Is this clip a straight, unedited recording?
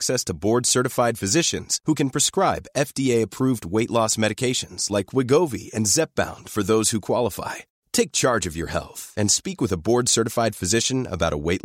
yes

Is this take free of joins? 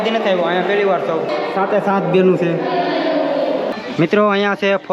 no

